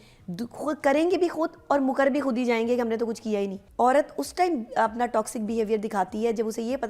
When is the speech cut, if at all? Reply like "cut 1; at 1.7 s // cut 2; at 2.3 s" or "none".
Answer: cut 1; at 3.6 s

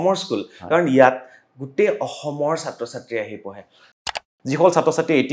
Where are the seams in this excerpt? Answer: cut 1; at 4.1 s

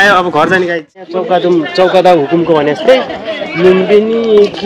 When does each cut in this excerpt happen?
cut 1; at 1.2 s

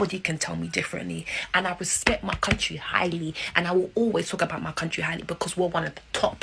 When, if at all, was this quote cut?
none

